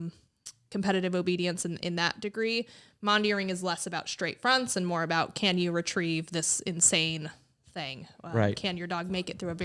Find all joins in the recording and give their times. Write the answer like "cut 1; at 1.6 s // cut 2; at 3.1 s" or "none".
none